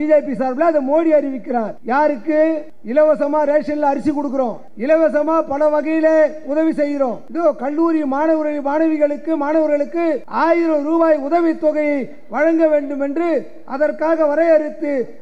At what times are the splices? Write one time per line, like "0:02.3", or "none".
0:01.8
0:02.7
0:04.7
0:07.2
0:10.3